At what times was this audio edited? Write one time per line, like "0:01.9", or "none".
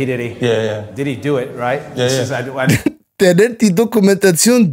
none